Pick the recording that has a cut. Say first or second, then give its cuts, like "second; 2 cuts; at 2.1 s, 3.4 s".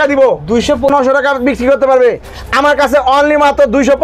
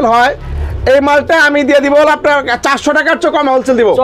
first; 1 cut; at 0.9 s